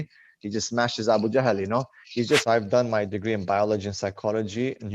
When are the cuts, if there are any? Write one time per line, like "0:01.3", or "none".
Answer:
0:02.4